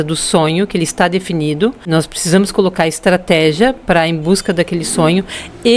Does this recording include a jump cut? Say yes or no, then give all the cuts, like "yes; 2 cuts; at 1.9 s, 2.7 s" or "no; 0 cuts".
yes; 1 cut; at 1.8 s